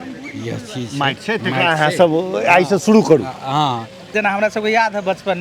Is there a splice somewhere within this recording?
yes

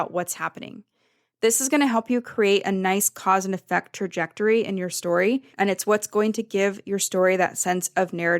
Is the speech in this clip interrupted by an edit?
yes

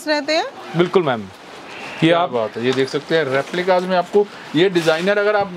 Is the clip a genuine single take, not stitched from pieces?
yes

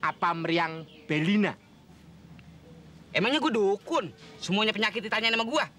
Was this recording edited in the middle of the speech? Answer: no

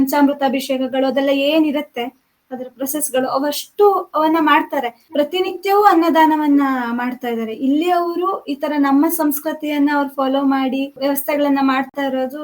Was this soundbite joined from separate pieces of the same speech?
yes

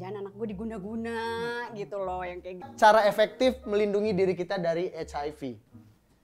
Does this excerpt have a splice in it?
yes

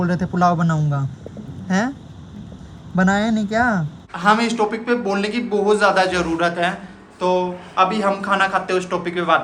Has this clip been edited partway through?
yes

